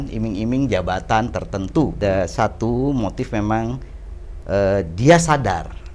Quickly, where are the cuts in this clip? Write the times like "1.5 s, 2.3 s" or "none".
2.0 s